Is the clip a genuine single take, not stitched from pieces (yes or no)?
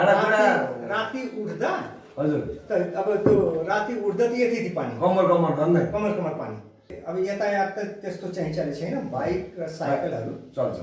no